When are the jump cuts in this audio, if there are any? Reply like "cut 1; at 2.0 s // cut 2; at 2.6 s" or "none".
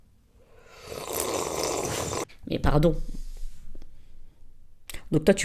cut 1; at 2.4 s